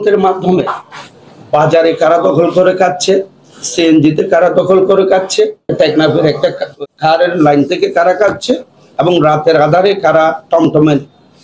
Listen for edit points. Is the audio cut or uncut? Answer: cut